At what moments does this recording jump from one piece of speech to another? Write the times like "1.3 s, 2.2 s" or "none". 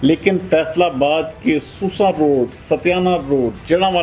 none